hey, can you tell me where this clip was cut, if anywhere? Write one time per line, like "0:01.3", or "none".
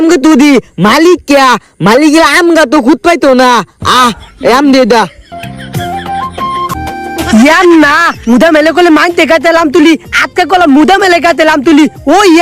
0:06.7